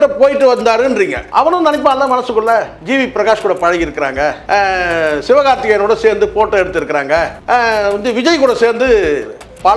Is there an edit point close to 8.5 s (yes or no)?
no